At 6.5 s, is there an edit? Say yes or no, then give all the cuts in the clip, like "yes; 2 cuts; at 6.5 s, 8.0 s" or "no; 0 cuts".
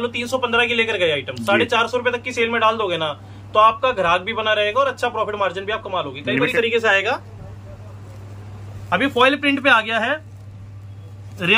yes; 1 cut; at 6.5 s